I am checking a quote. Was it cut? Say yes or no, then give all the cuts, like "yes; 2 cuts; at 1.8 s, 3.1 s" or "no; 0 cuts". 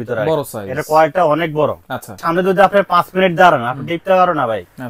yes; 1 cut; at 2.2 s